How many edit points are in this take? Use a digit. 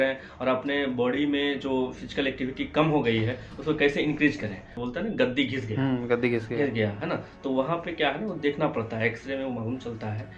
1